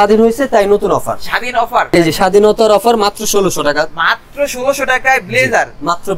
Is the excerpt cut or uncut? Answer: cut